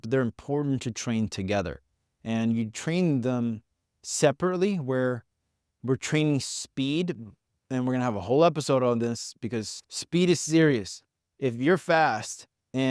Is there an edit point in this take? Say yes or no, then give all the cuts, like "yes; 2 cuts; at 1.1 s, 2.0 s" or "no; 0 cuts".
no; 0 cuts